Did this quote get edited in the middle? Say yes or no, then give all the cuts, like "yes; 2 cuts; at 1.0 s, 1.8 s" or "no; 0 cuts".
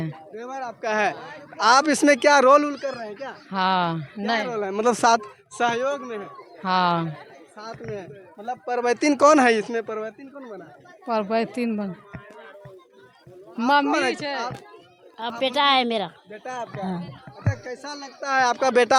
no; 0 cuts